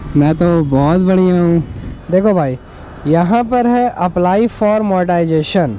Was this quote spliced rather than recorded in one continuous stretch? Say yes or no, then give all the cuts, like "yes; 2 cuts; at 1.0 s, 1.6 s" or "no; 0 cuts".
yes; 1 cut; at 1.9 s